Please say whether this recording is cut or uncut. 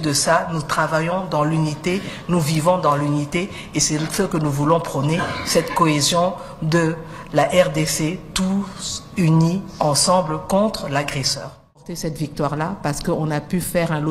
cut